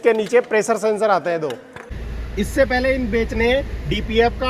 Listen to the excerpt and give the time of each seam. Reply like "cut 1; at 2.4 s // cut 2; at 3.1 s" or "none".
cut 1; at 1.8 s